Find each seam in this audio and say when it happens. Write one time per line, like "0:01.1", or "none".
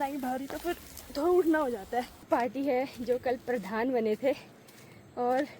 0:02.2

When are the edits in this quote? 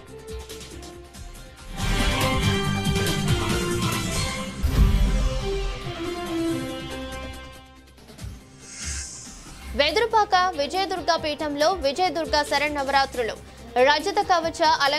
none

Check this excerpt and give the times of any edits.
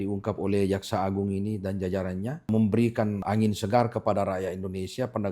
0:02.5
0:03.2

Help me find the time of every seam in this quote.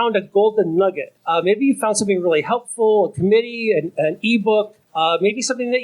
0:01.1
0:04.8

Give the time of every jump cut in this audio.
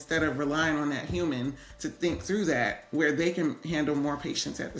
none

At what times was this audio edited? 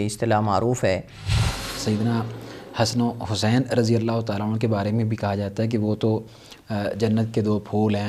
0:01.6

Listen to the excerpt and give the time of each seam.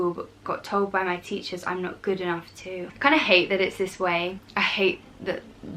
0:02.9
0:04.4

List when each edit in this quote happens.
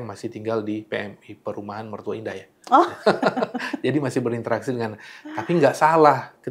none

